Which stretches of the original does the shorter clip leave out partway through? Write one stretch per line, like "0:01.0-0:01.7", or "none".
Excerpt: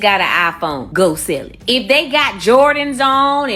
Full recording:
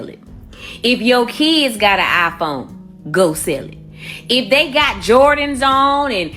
0:02.6-0:03.0
0:03.7-0:04.1